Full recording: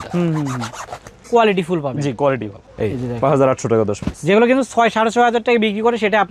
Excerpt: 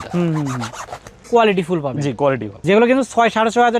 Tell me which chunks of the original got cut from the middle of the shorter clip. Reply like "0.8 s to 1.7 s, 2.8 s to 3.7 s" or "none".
2.5 s to 4.1 s